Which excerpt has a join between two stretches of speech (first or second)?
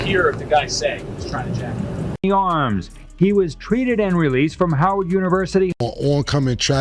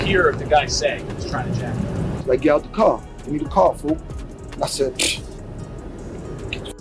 first